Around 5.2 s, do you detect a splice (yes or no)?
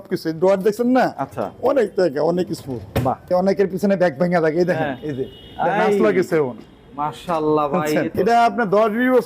no